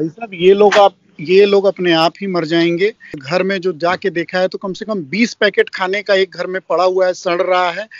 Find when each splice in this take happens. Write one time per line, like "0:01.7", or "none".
0:03.1